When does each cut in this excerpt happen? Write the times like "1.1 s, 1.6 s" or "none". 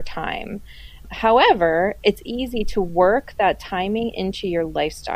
1.0 s